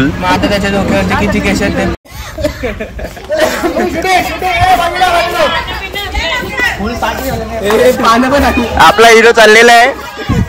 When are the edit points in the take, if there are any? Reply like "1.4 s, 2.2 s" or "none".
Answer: 2.0 s